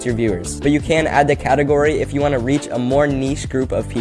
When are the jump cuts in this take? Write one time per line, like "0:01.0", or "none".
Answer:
none